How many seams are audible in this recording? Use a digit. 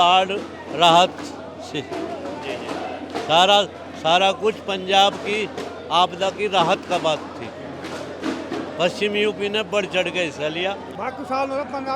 1